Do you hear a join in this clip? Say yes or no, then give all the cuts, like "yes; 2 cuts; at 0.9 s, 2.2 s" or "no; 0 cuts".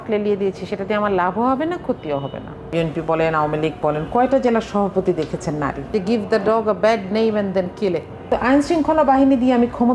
yes; 3 cuts; at 2.7 s, 5.9 s, 8.3 s